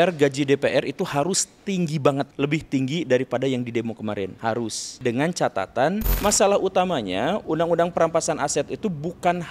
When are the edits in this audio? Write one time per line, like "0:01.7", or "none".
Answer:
0:02.3
0:04.5
0:06.1
0:07.4